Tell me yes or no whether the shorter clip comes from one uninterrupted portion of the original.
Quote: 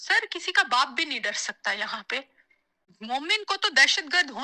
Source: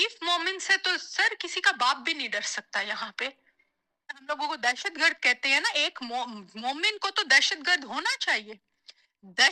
no